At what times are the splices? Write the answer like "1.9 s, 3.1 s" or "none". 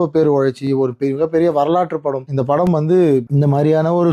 2.2 s, 3.3 s

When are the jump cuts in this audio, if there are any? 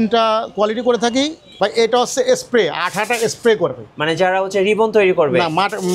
1.5 s

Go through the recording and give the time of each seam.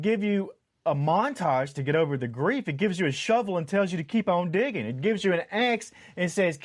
none

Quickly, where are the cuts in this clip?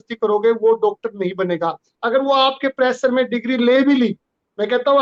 none

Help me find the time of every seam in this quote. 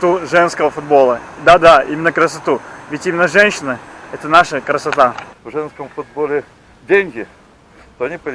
5.2 s

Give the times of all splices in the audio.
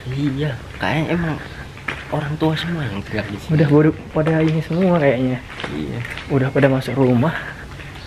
none

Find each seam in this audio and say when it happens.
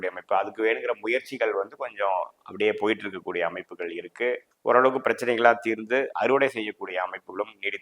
4.5 s

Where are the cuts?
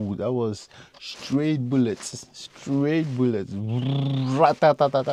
none

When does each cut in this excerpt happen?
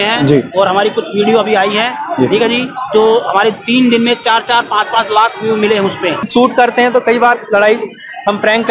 6.2 s

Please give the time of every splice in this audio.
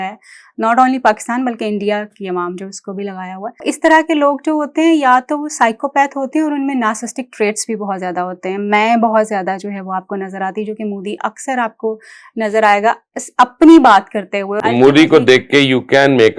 3.6 s, 14.6 s

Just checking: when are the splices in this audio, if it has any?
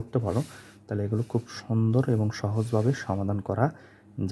none

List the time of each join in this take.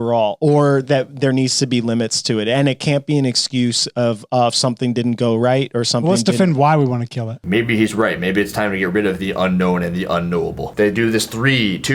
10.7 s

